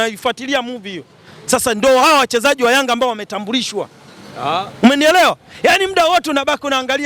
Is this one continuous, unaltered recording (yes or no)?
yes